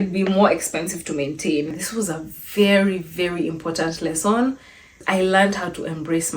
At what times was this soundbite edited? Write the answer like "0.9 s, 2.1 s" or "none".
1.8 s, 5.0 s